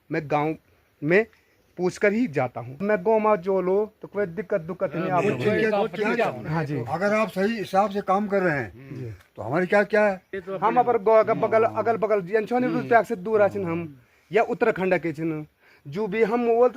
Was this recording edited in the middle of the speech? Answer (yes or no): yes